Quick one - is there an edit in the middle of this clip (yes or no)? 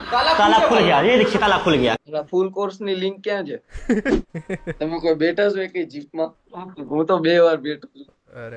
yes